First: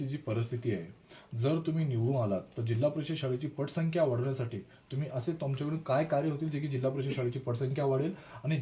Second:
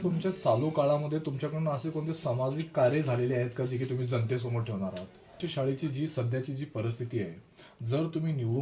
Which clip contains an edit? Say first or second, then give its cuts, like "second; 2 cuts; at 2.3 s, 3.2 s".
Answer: second; 1 cut; at 5.4 s